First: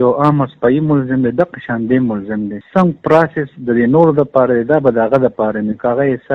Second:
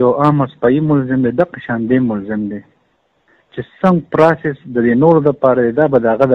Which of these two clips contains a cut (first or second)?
first